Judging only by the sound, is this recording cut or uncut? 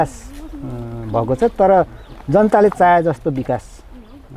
uncut